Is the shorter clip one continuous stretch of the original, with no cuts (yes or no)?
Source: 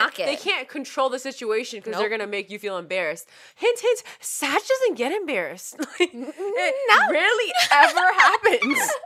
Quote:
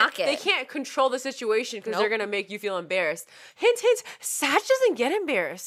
yes